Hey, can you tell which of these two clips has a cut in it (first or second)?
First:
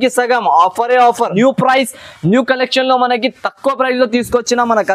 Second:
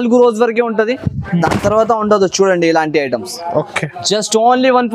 first